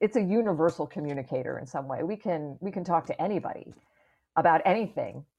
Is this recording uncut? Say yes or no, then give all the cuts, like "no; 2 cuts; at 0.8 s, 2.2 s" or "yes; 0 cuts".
yes; 0 cuts